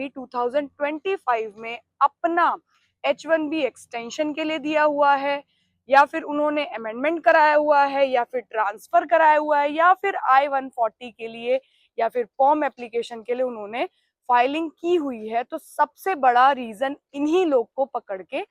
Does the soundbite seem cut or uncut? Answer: uncut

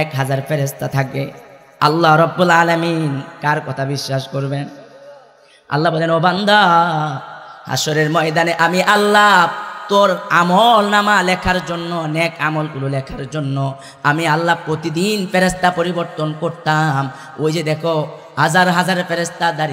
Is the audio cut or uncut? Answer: uncut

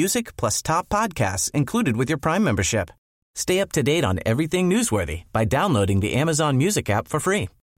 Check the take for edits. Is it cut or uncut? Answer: uncut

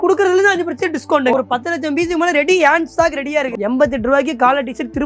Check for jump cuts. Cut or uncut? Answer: cut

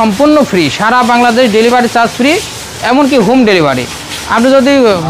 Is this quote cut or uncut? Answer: uncut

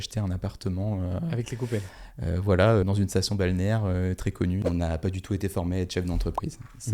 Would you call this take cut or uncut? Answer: cut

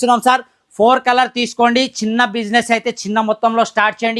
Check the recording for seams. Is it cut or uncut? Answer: uncut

